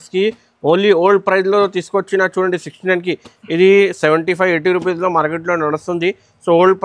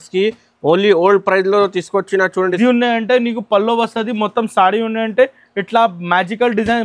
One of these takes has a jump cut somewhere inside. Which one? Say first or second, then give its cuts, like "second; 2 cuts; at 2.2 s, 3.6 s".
second; 1 cut; at 2.6 s